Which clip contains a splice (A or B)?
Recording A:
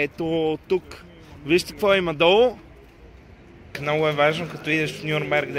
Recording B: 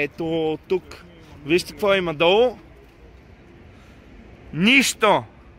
A